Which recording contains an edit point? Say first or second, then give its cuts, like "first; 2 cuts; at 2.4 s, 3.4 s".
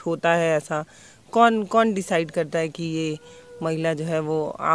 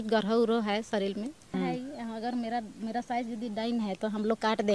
second; 1 cut; at 1.4 s